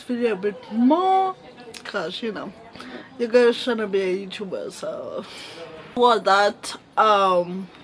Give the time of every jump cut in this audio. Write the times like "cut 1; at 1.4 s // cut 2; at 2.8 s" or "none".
cut 1; at 6.0 s